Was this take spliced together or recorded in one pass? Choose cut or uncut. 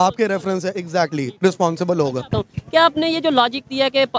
cut